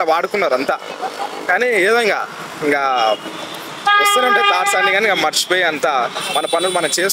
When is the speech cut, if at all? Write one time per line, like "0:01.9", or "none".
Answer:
none